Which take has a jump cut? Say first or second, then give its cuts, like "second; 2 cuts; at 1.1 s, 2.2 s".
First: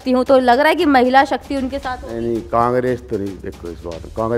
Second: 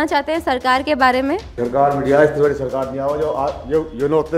second; 1 cut; at 1.5 s